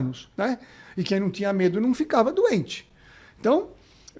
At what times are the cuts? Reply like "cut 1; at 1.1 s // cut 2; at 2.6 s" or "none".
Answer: none